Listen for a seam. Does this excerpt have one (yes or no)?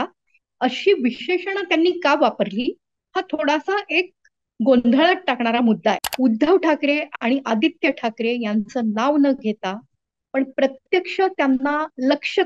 yes